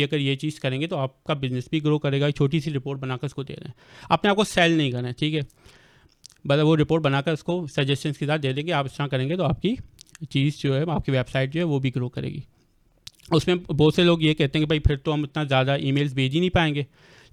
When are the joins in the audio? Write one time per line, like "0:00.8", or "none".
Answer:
none